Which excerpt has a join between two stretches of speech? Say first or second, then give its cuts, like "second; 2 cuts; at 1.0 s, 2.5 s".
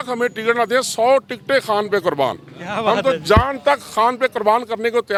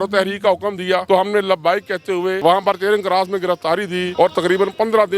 second; 3 cuts; at 1.0 s, 2.4 s, 4.1 s